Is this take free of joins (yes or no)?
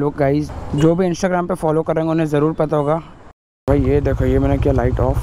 no